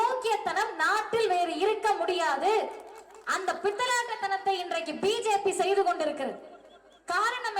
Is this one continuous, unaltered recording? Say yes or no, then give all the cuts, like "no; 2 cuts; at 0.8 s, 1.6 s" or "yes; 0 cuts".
yes; 0 cuts